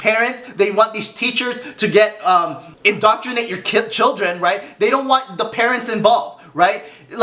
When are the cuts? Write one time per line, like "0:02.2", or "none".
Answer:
0:02.6